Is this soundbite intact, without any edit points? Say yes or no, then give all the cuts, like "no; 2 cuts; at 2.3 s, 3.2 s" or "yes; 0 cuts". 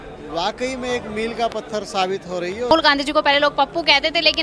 no; 1 cut; at 2.7 s